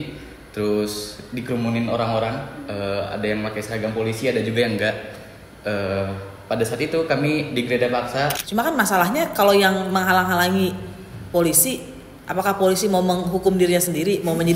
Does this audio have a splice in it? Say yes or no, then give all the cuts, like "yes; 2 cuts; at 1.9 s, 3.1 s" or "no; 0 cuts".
yes; 1 cut; at 8.4 s